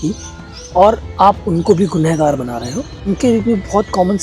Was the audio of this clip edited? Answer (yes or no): yes